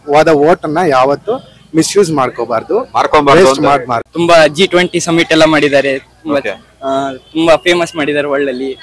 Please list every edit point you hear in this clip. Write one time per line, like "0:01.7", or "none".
0:04.1